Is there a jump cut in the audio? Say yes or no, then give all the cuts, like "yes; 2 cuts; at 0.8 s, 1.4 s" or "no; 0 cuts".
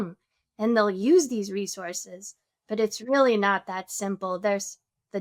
no; 0 cuts